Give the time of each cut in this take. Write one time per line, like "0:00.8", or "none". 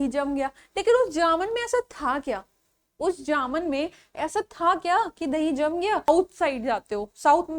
0:06.1